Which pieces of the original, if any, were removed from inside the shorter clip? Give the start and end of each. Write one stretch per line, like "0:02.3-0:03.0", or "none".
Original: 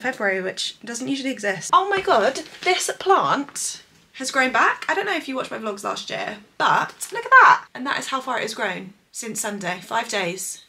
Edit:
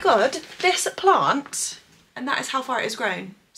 0:04.1-0:07.7